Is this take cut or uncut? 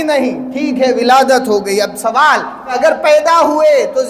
cut